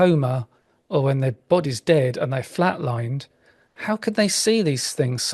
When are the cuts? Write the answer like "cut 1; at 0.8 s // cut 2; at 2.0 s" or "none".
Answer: none